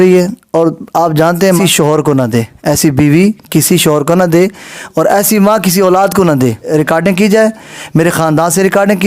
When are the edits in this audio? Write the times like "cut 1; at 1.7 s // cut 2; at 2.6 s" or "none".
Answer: cut 1; at 1.6 s // cut 2; at 6.7 s